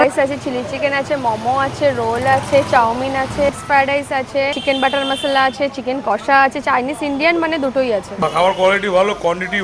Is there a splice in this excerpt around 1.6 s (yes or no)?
no